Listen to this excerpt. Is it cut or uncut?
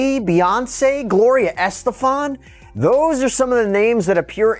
uncut